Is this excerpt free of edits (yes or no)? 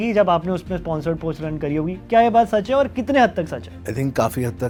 yes